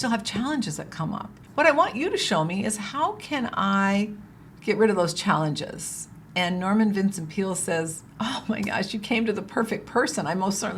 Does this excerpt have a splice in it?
no; 0 cuts

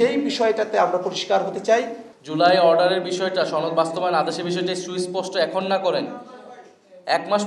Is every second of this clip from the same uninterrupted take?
no; 1 cut; at 2.0 s

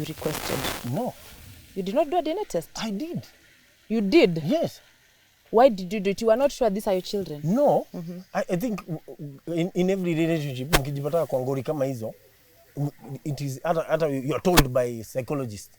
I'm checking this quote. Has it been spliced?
no; 0 cuts

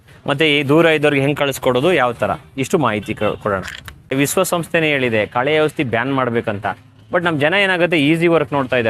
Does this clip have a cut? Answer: yes; 1 cut; at 4.1 s

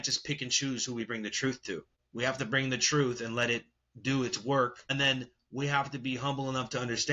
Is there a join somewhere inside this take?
yes; 2 cuts; at 2.0 s, 4.8 s

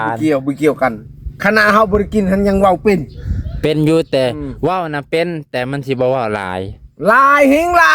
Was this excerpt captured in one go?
yes; 0 cuts

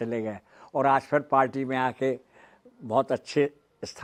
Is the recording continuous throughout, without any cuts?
yes; 0 cuts

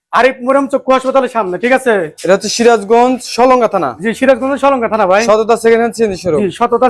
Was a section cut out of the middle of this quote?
no; 0 cuts

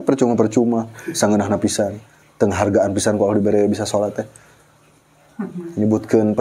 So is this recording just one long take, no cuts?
yes; 0 cuts

